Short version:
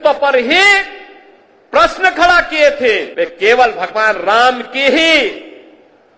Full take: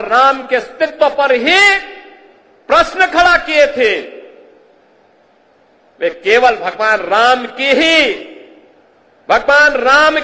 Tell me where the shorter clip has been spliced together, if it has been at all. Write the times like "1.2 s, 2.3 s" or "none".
3.1 s